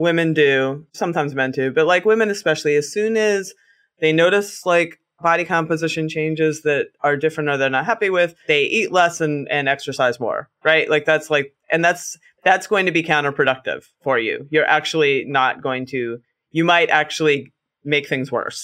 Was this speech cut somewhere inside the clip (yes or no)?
yes